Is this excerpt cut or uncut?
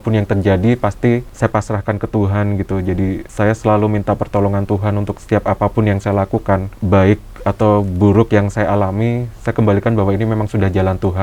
cut